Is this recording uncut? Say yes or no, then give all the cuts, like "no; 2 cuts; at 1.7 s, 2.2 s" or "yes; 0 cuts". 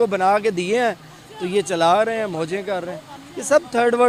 yes; 0 cuts